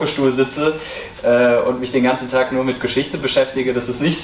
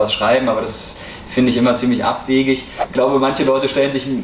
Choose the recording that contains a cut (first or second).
second